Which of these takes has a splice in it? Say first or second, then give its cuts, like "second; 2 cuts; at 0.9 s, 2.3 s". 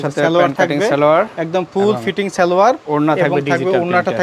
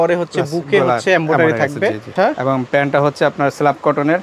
second; 1 cut; at 2.1 s